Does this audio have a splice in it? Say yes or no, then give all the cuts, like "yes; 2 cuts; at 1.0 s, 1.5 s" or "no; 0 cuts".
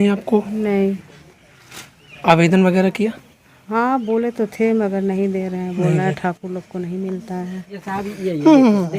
yes; 1 cut; at 7.8 s